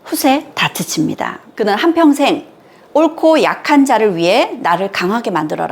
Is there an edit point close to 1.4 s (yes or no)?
yes